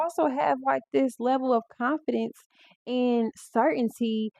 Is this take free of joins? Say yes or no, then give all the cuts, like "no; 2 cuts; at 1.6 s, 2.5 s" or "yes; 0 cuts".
yes; 0 cuts